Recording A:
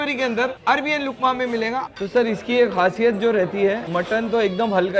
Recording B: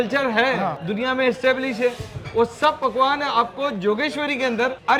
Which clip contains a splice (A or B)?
A